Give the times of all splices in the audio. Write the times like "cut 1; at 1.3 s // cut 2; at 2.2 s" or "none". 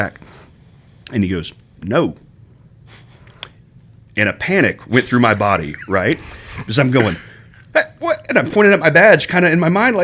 none

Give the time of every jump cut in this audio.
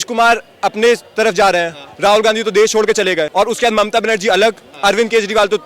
cut 1; at 3.3 s

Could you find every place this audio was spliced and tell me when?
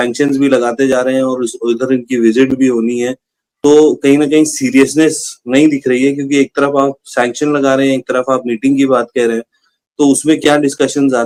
none

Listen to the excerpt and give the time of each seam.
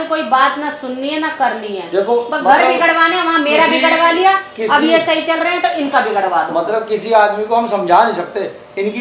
none

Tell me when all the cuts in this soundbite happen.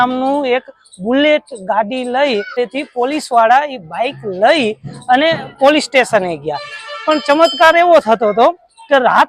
cut 1; at 2.6 s

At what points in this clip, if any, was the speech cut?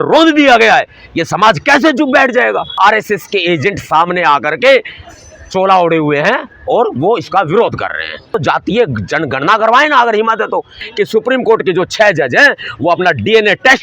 cut 1; at 2.7 s // cut 2; at 8.3 s // cut 3; at 10.8 s

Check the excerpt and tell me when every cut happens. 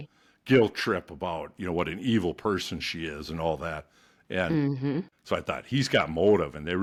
none

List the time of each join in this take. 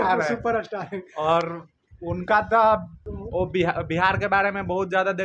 cut 1; at 3.1 s

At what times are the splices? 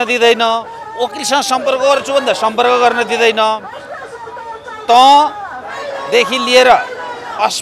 none

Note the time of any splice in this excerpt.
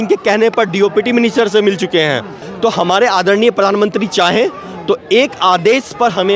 cut 1; at 2.4 s

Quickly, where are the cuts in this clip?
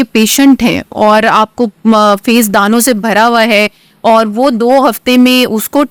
none

